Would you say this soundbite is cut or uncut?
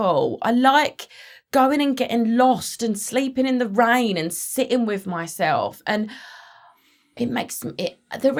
uncut